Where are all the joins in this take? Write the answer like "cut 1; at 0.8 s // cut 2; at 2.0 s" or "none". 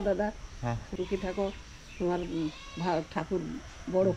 cut 1; at 0.9 s